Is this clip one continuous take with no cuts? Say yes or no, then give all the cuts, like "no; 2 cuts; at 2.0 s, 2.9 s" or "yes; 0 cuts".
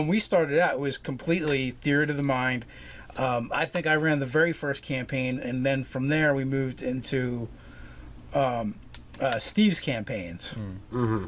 yes; 0 cuts